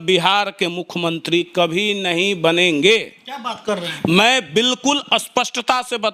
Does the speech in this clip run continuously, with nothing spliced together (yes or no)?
yes